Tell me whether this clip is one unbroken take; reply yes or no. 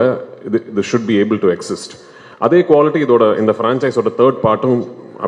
yes